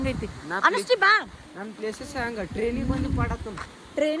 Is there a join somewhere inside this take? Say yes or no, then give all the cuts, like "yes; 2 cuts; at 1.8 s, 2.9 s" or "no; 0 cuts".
no; 0 cuts